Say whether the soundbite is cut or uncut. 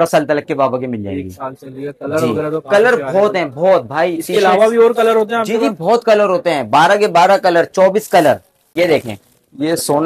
cut